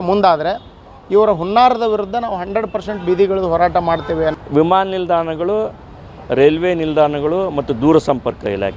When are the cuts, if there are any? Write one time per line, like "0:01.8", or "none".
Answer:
0:04.4